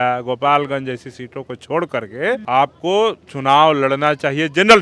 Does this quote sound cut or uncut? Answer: cut